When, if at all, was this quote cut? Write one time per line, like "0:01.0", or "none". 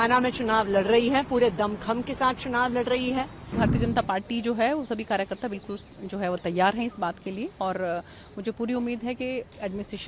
0:03.5